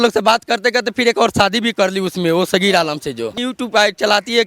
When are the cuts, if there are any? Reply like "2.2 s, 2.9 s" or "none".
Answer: 3.4 s